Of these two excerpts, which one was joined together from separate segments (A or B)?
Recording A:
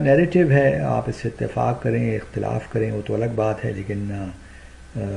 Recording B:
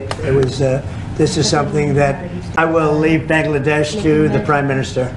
B